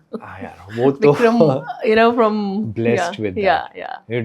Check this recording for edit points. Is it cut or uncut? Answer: uncut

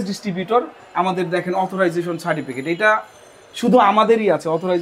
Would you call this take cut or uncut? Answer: uncut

